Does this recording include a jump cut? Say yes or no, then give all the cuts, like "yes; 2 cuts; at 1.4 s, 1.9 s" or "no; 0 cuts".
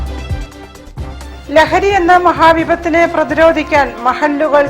yes; 1 cut; at 1.2 s